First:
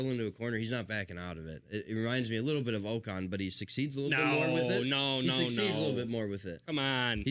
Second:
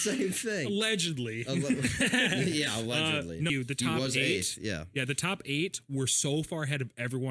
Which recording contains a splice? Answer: second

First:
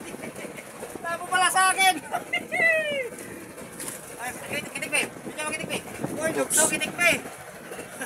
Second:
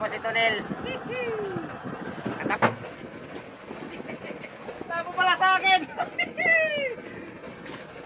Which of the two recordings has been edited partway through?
second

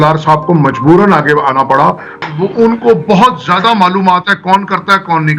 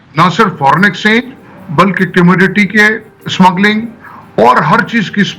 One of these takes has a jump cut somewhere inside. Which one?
first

